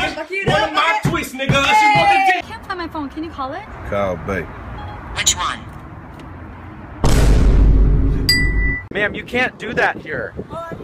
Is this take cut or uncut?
cut